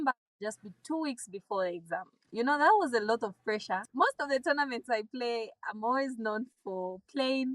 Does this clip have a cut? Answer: yes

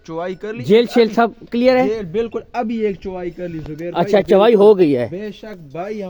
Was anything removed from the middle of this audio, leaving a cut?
no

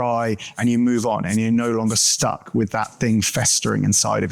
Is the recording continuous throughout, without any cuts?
yes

